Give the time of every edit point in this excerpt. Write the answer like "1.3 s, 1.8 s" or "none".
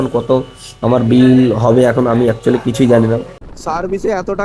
3.3 s